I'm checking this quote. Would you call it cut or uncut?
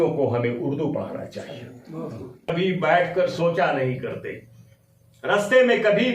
cut